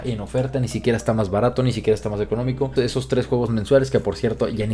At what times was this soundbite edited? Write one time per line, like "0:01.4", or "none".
0:02.7